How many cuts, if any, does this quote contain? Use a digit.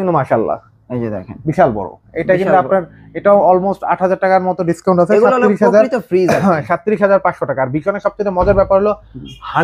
0